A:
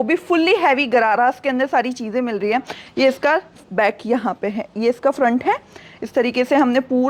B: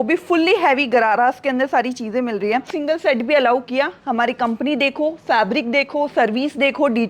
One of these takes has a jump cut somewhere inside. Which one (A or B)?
B